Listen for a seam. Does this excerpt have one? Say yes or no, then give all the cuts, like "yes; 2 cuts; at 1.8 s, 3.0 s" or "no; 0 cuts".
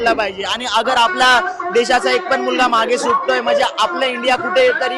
no; 0 cuts